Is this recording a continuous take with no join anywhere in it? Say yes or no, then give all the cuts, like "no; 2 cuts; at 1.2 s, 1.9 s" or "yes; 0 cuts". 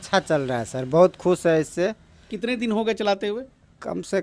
yes; 0 cuts